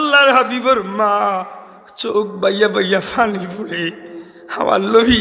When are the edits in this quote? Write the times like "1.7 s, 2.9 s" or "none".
none